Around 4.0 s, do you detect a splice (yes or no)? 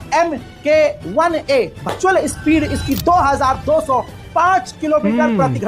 no